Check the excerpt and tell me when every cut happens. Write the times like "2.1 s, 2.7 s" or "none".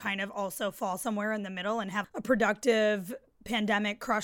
2.1 s